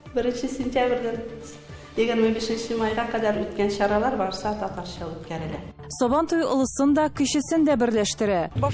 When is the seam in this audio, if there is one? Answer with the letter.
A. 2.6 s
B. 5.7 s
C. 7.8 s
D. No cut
B